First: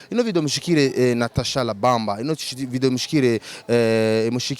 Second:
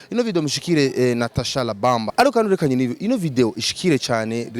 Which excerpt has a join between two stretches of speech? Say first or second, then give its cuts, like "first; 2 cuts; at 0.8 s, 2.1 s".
second; 1 cut; at 2.1 s